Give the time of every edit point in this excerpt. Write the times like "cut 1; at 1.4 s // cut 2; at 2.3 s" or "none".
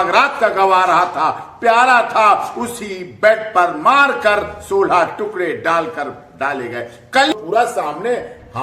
cut 1; at 7.3 s